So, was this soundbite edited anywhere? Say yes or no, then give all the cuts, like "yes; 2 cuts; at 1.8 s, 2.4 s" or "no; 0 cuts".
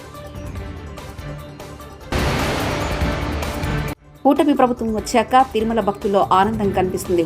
yes; 2 cuts; at 2.0 s, 4.0 s